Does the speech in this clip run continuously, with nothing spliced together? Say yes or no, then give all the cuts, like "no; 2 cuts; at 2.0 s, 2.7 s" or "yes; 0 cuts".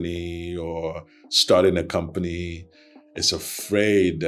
yes; 0 cuts